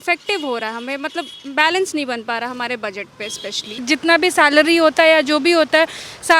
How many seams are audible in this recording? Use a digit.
1